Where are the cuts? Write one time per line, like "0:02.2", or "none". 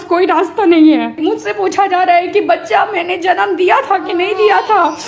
0:01.2